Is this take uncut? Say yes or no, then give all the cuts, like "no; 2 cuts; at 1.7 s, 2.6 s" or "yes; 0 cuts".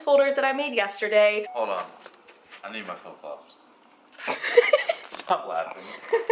no; 1 cut; at 1.5 s